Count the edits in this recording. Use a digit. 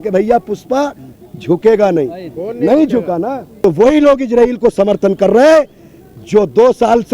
1